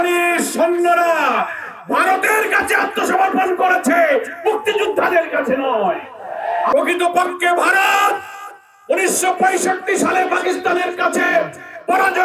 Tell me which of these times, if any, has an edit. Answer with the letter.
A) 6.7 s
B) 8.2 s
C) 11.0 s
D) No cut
A